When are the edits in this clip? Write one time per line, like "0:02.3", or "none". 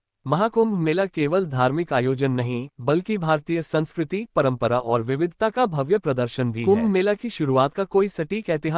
0:06.6